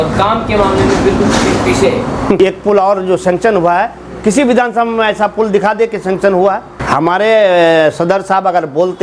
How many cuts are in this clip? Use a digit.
2